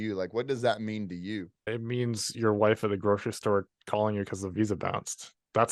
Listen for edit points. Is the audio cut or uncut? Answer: cut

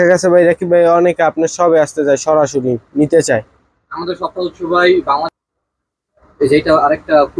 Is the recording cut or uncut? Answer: cut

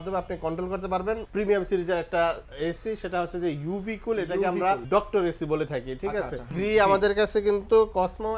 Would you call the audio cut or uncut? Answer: cut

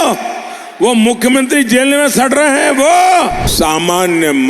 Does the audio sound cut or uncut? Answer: cut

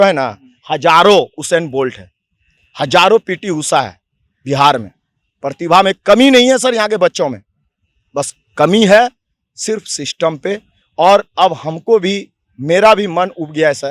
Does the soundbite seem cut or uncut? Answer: uncut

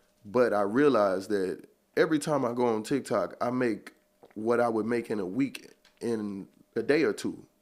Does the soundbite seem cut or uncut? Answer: cut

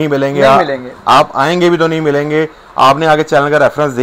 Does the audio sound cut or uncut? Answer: uncut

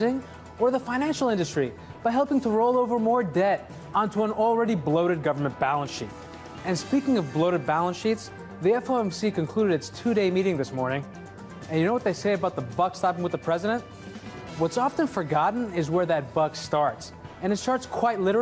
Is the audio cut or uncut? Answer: cut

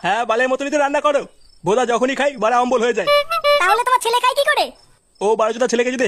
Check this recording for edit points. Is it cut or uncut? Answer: uncut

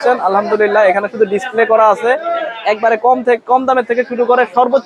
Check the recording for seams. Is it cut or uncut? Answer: uncut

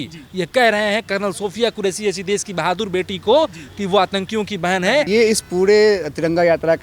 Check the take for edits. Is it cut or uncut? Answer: cut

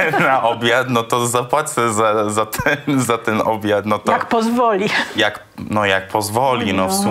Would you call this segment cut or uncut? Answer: uncut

